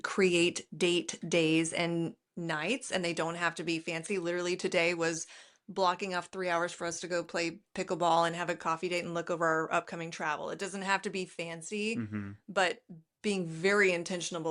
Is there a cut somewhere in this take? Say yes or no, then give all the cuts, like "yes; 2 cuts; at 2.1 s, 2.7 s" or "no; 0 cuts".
no; 0 cuts